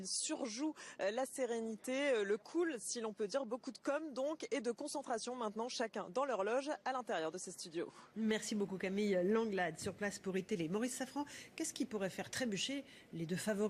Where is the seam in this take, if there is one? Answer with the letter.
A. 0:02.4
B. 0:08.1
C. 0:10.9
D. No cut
C